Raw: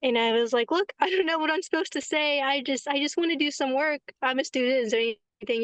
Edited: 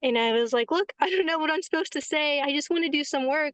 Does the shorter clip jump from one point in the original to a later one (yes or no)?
yes